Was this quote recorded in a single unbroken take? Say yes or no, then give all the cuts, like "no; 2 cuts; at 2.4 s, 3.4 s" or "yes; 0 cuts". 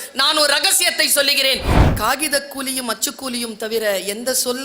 no; 1 cut; at 1.7 s